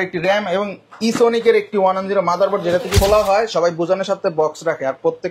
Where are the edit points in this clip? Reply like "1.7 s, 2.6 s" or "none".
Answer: 3.0 s